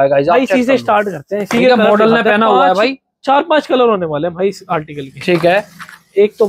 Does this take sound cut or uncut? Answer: uncut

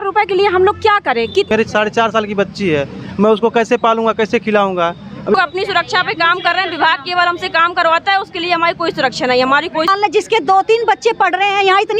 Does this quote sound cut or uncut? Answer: cut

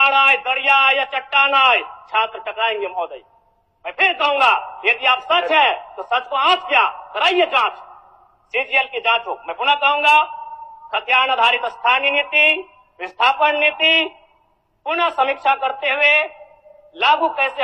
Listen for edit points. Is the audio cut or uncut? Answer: uncut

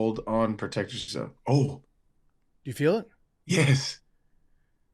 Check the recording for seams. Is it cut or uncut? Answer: uncut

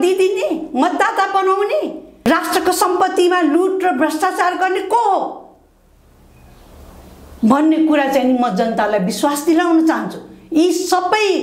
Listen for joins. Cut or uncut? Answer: uncut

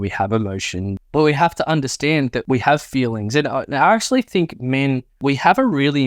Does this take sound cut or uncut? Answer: cut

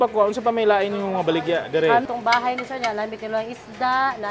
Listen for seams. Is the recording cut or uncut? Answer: cut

